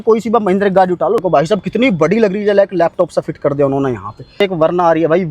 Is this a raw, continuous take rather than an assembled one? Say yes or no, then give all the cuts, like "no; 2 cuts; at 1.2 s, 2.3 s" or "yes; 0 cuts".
no; 2 cuts; at 1.2 s, 4.3 s